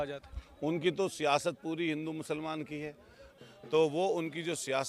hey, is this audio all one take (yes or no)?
no